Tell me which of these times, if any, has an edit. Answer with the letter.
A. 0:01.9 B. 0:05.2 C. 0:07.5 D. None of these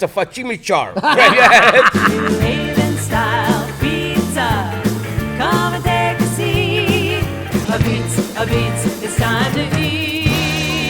A